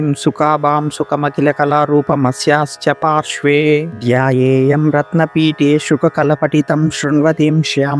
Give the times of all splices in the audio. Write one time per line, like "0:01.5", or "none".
0:03.9